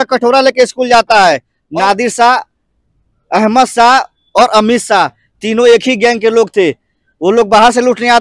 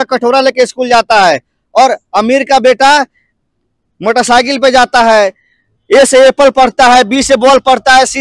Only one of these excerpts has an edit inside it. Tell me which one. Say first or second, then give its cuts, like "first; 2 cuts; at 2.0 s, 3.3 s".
first; 1 cut; at 1.6 s